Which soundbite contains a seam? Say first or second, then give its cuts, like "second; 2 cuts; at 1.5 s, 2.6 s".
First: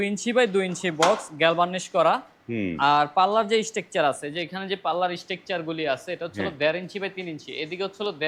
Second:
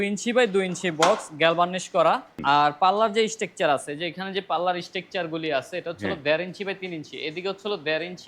second; 1 cut; at 2.4 s